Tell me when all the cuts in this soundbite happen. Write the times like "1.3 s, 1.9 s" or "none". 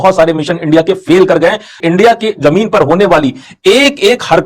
1.8 s